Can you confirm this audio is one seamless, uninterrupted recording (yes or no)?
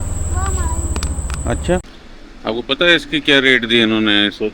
no